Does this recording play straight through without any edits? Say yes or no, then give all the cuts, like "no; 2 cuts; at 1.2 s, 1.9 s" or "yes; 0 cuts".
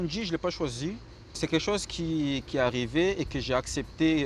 no; 1 cut; at 1.3 s